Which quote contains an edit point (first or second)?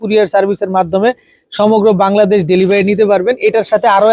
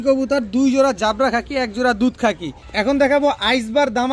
second